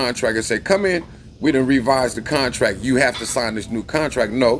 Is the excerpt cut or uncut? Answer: uncut